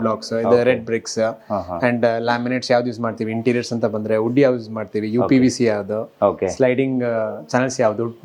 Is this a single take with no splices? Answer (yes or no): yes